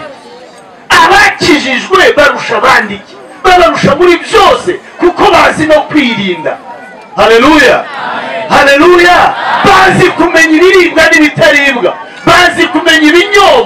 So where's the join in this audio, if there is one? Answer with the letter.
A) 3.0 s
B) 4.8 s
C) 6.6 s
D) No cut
D